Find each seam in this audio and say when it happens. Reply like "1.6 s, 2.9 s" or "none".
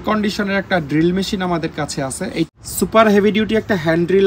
2.5 s